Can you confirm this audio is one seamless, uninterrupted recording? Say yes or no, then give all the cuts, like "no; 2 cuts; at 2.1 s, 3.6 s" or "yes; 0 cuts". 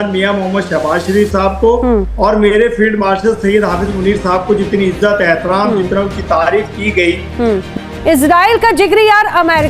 no; 1 cut; at 7.7 s